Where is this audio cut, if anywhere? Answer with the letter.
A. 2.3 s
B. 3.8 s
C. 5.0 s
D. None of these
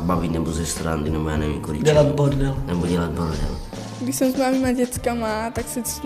B